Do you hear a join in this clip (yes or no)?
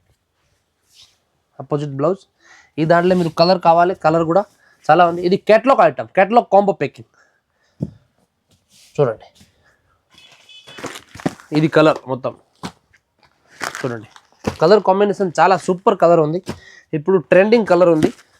no